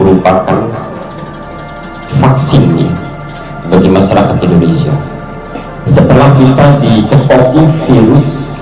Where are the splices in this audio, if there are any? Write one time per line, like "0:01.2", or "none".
none